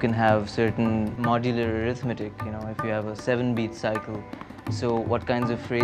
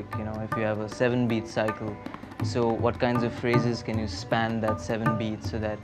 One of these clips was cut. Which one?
first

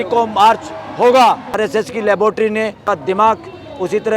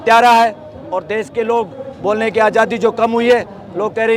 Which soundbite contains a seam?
first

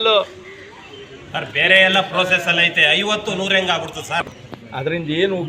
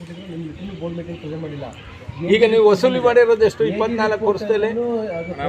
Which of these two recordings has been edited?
first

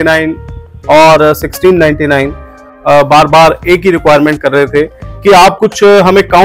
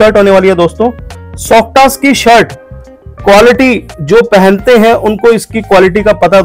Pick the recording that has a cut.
first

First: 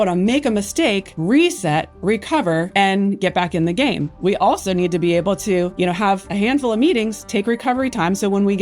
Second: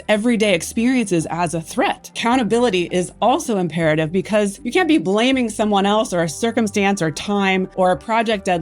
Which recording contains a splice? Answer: second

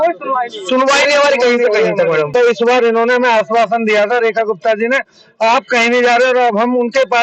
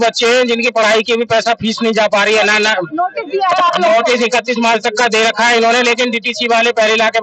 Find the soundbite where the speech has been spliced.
first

